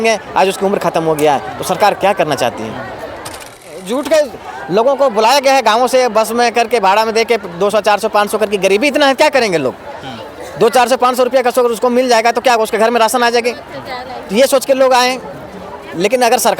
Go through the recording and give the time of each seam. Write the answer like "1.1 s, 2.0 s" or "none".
3.8 s